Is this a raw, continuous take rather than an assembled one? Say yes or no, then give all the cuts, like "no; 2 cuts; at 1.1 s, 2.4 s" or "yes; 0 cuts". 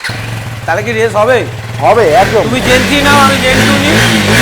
yes; 0 cuts